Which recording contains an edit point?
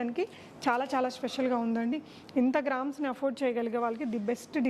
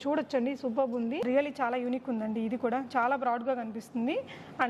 second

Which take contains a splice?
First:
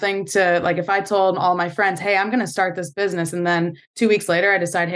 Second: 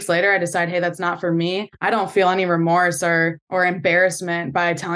second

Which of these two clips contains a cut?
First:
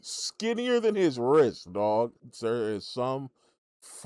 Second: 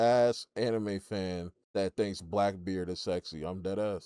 first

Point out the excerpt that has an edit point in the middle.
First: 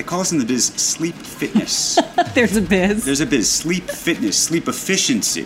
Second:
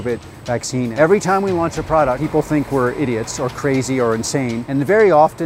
second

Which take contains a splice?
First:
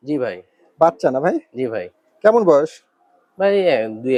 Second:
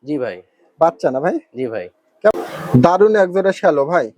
second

